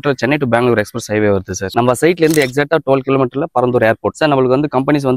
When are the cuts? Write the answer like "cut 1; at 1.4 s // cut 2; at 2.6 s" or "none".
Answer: cut 1; at 1.6 s // cut 2; at 4.1 s